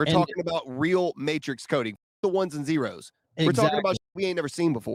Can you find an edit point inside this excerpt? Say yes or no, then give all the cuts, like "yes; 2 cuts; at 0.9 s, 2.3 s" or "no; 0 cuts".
no; 0 cuts